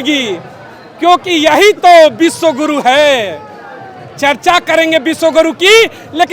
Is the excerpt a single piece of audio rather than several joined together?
yes; 0 cuts

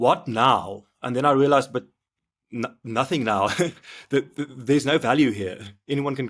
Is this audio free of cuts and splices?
yes; 0 cuts

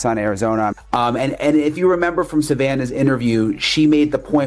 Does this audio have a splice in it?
no; 0 cuts

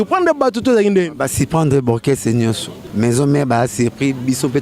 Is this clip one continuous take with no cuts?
no; 1 cut; at 2.7 s

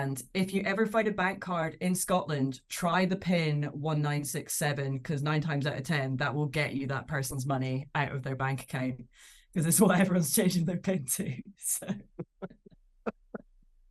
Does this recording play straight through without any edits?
yes; 0 cuts

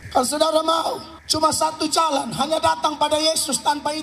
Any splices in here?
yes; 1 cut; at 1.1 s

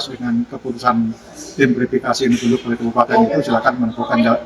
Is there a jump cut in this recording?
no; 0 cuts

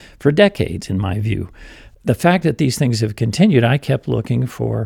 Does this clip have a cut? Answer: no; 0 cuts

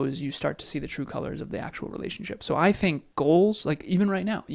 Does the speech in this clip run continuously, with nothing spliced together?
yes; 0 cuts

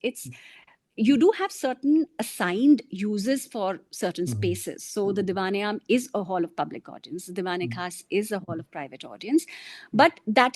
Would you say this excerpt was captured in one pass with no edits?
yes; 0 cuts

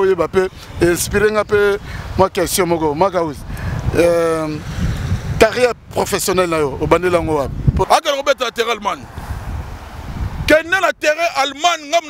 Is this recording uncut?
no; 1 cut; at 7.8 s

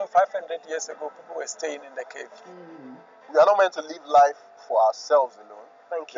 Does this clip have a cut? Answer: yes; 1 cut; at 2.7 s

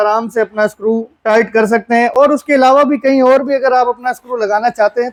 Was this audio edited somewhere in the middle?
no; 0 cuts

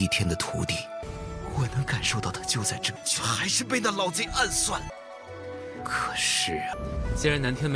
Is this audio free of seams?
no; 1 cut; at 6.7 s

